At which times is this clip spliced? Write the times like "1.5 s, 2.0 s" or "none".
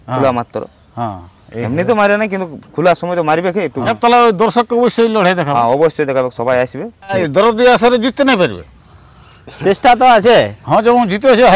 3.9 s, 7.2 s